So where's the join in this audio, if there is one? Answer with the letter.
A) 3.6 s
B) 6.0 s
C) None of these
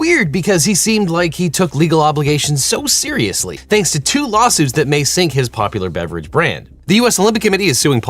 A